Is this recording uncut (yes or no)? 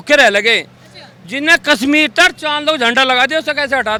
yes